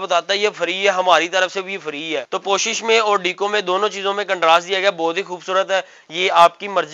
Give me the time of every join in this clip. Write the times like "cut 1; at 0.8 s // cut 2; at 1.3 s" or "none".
cut 1; at 2.3 s